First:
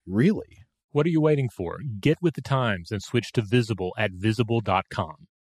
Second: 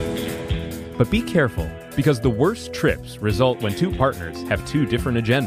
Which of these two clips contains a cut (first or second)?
second